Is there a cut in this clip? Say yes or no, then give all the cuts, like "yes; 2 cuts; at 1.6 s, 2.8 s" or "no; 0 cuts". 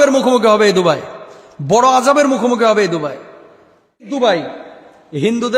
yes; 1 cut; at 4.1 s